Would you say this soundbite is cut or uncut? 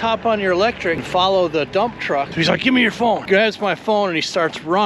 cut